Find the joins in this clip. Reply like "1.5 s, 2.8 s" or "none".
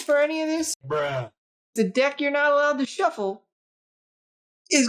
1.7 s